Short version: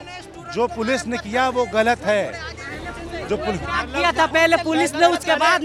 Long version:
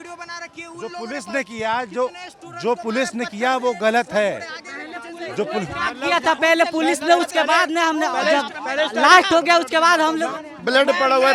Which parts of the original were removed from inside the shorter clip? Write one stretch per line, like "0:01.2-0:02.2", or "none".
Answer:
none